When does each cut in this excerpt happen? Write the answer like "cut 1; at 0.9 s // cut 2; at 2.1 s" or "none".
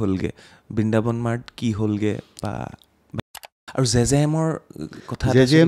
cut 1; at 3.2 s